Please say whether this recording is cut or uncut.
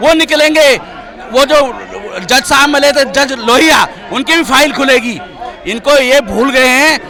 uncut